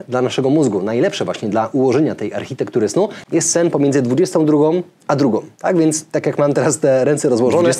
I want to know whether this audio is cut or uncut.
uncut